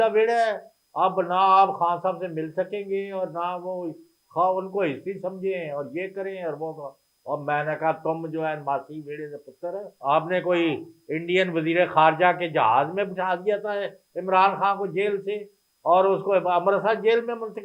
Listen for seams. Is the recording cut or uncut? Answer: cut